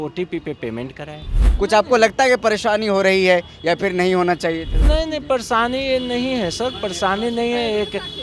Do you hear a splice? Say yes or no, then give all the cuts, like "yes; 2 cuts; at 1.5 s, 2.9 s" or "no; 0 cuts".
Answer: yes; 2 cuts; at 1.4 s, 4.7 s